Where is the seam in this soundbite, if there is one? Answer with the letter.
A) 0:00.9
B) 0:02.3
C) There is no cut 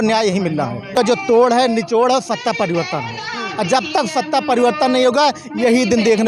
A